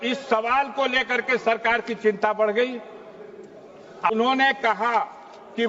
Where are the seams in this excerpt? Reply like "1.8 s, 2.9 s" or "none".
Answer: 4.1 s